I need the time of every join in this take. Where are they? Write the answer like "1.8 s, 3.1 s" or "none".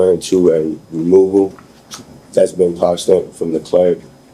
none